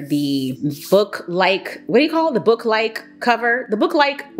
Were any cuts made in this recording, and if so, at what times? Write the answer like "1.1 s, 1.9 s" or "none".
none

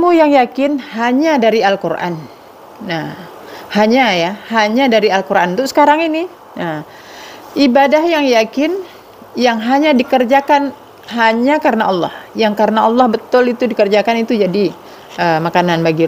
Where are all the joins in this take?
none

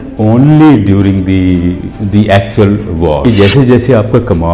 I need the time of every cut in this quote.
1.9 s, 3.2 s

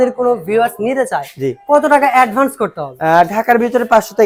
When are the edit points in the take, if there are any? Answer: none

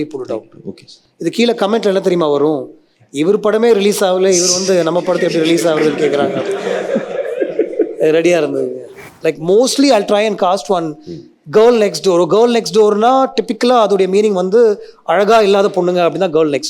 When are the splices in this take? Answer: 9.1 s

